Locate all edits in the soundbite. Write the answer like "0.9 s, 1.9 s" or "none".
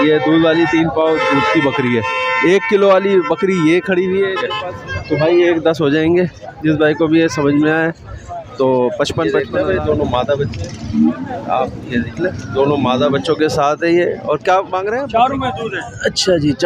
4.5 s, 9.4 s, 14.9 s